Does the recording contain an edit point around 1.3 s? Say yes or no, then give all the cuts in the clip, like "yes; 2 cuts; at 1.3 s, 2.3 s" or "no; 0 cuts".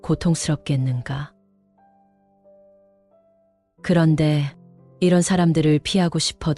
yes; 2 cuts; at 1.3 s, 3.8 s